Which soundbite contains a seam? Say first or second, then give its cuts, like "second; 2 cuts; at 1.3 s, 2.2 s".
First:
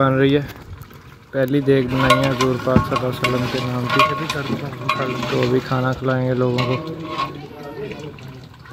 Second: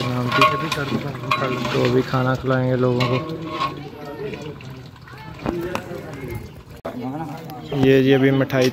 second; 1 cut; at 6.8 s